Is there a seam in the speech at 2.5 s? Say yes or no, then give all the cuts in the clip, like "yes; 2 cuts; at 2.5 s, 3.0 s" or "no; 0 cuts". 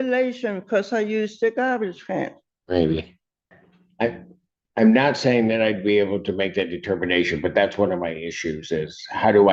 yes; 1 cut; at 2.5 s